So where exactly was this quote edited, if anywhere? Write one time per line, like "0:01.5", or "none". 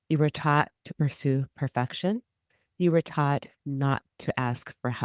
0:04.1

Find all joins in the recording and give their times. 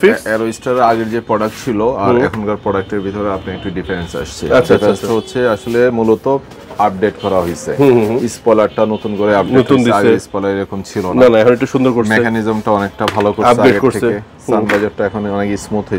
none

